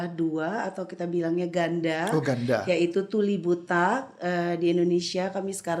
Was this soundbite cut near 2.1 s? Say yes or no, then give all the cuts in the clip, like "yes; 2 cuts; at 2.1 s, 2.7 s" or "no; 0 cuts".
no; 0 cuts